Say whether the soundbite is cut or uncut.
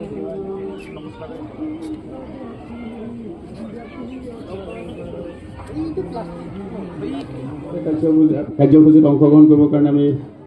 cut